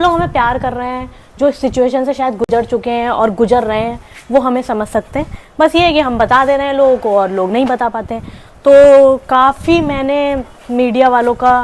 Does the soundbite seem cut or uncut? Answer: uncut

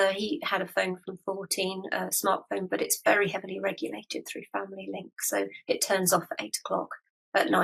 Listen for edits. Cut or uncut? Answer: uncut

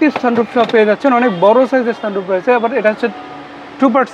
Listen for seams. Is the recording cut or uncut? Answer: uncut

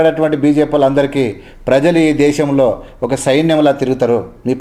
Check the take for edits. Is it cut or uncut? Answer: uncut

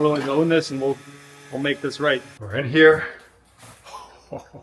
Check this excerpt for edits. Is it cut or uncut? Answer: cut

